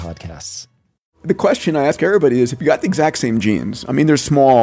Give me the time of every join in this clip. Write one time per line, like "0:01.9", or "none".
0:01.1